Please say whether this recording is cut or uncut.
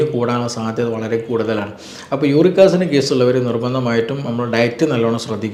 uncut